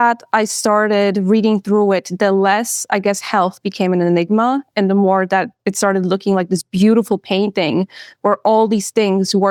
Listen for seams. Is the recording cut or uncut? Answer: uncut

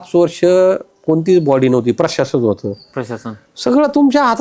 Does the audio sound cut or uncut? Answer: uncut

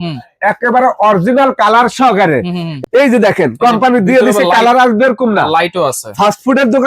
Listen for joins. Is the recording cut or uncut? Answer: cut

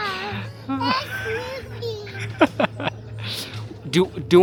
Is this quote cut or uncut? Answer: uncut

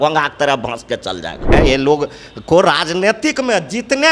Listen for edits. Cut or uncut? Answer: cut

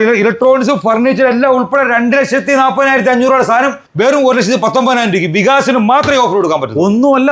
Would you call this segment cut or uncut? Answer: uncut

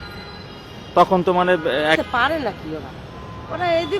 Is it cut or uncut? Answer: cut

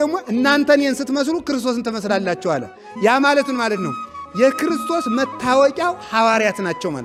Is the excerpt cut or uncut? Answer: uncut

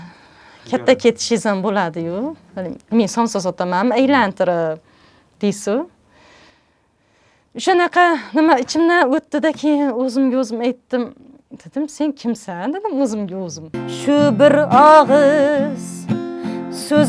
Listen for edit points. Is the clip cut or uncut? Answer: cut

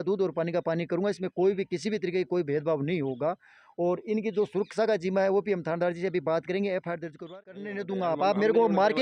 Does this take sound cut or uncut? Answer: cut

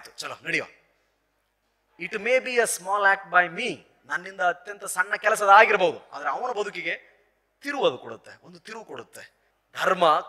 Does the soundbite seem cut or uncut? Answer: cut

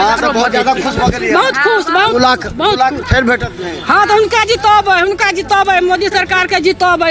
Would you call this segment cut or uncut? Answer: uncut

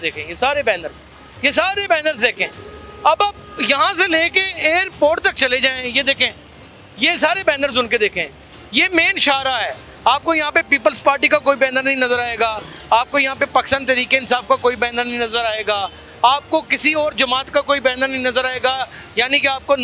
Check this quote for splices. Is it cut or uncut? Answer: uncut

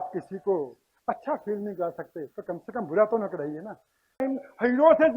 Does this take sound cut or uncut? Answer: cut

